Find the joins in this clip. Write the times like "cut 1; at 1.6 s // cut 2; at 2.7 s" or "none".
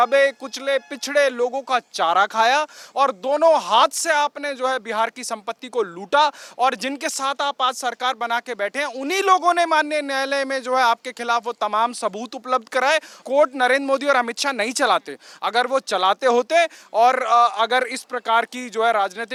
none